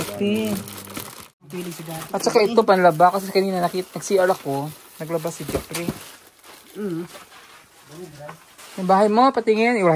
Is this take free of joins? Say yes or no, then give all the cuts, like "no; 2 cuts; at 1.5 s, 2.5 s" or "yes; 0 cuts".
no; 1 cut; at 1.4 s